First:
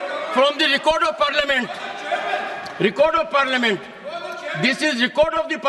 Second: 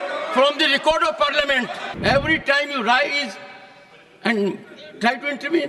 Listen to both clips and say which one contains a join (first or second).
second